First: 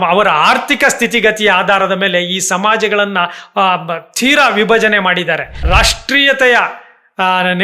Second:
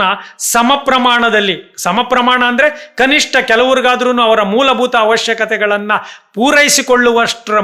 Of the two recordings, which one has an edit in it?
first; 1 cut; at 5.6 s

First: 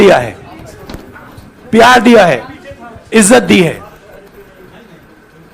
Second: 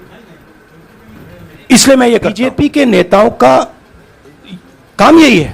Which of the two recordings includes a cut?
second; 1 cut; at 2.4 s

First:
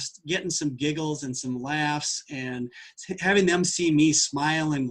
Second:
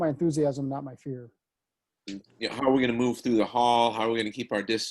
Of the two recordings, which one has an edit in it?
second; 1 cut; at 1.4 s

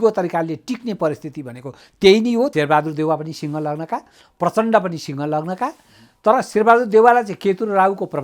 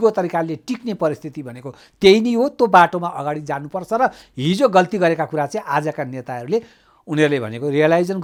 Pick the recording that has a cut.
first; 1 cut; at 2.5 s

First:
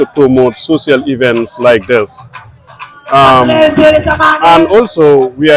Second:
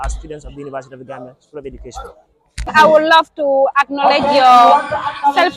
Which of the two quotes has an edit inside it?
second; 1 cut; at 2.7 s

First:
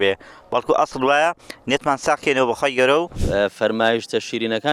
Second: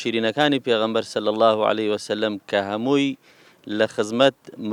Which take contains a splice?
first; 1 cut; at 3.2 s

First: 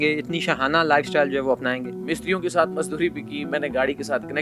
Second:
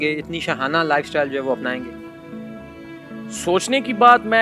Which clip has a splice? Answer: first; 1 cut; at 1.9 s

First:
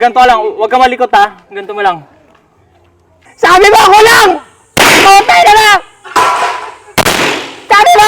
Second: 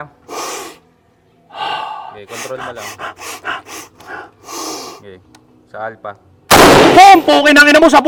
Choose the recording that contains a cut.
first; 1 cut; at 3.2 s

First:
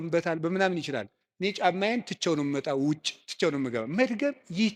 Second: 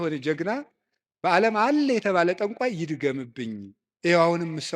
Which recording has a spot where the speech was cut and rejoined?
second; 1 cut; at 3.8 s

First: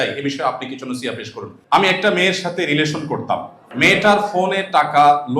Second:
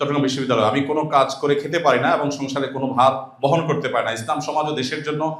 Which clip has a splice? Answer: first; 2 cuts; at 1.5 s, 3.6 s

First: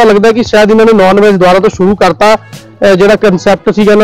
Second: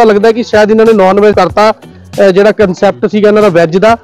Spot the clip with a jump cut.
second; 1 cut; at 1.3 s

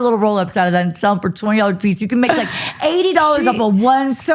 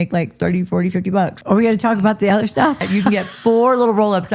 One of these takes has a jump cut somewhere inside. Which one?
second; 2 cuts; at 1.4 s, 2.9 s

